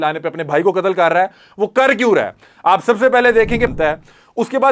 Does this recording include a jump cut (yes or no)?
yes